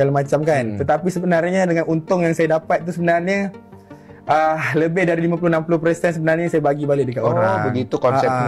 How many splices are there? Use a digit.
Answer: 0